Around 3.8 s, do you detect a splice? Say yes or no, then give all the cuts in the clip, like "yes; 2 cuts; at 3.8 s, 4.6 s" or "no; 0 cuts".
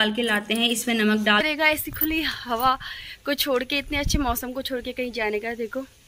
no; 1 cut; at 1.4 s